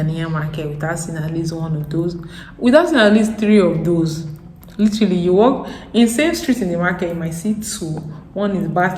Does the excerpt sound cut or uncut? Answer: uncut